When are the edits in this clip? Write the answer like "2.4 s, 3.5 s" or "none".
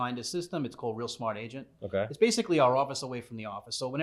none